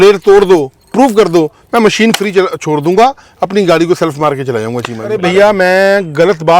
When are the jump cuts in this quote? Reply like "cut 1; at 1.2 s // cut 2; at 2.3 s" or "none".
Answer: cut 1; at 5.1 s